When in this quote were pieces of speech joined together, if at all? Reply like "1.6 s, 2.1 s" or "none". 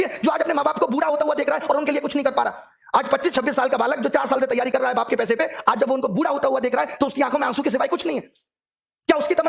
none